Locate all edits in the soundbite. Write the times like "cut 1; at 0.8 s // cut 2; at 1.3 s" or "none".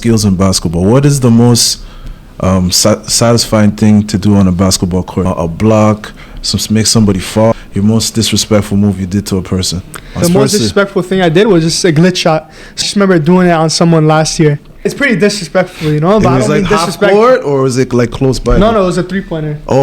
cut 1; at 5.2 s // cut 2; at 7.5 s // cut 3; at 10.2 s // cut 4; at 12.8 s // cut 5; at 14.9 s